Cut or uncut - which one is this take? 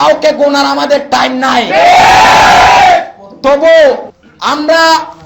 uncut